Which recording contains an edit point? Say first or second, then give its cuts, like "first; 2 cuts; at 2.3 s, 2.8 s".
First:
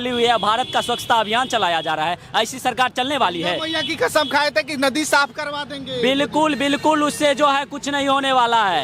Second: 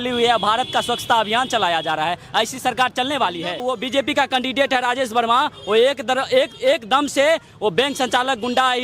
second; 1 cut; at 3.6 s